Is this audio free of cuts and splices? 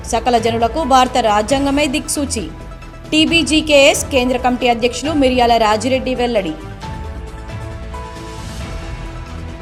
yes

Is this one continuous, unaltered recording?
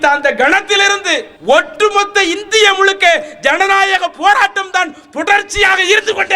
no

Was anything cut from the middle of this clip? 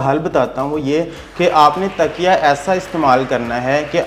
no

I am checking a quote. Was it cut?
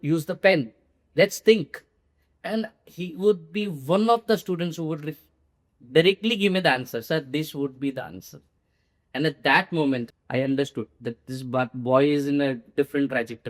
yes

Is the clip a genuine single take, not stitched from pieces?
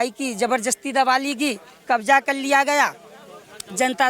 yes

